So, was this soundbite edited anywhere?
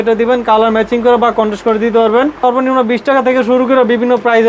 yes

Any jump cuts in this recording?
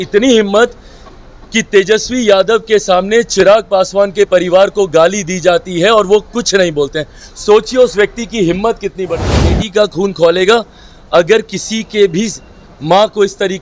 yes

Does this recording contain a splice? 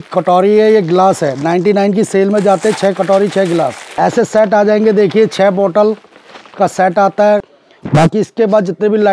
yes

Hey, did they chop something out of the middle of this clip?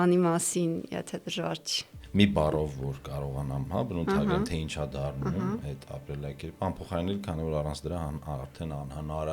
yes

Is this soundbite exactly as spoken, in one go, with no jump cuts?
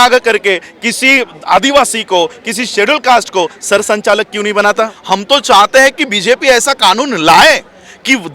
no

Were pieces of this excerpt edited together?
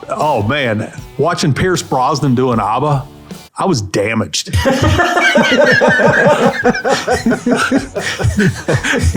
no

